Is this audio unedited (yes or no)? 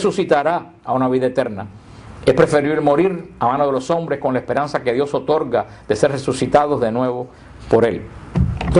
yes